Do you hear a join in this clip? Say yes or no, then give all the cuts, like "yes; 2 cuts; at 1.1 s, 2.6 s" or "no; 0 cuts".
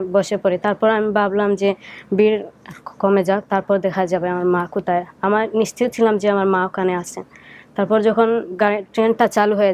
no; 0 cuts